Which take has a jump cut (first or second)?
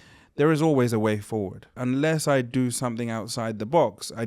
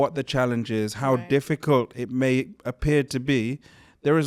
first